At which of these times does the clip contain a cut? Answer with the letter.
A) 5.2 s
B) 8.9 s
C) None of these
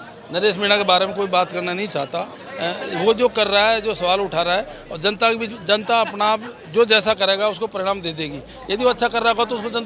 C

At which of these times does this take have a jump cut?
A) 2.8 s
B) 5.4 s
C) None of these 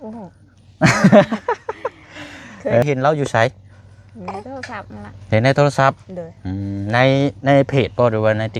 A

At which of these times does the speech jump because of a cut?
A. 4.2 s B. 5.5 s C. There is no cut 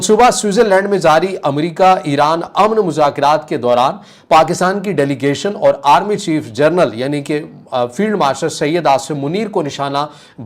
C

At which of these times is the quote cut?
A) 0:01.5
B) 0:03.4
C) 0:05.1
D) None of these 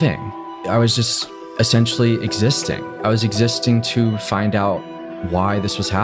D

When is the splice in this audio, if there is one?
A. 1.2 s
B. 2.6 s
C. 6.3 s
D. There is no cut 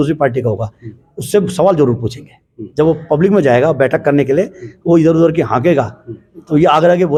D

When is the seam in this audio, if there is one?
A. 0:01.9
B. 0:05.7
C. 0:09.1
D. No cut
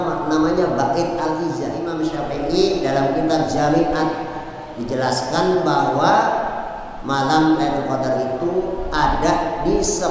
A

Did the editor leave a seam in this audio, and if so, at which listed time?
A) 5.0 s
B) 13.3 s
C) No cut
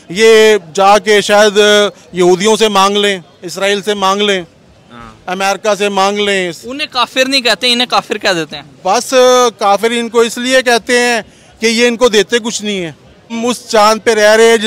B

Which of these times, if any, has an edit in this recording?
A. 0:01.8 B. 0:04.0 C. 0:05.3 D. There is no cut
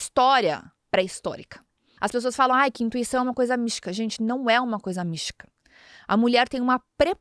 A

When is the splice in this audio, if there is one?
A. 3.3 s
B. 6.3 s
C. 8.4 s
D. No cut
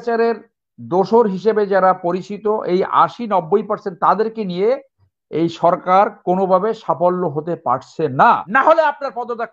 C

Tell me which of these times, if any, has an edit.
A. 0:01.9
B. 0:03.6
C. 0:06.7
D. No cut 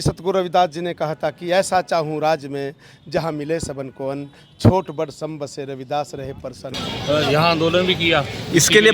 C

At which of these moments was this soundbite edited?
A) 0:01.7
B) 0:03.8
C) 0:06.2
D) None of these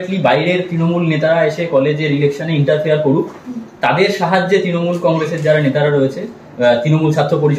D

